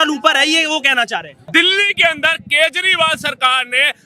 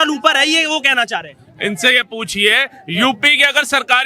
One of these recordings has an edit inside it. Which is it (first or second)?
first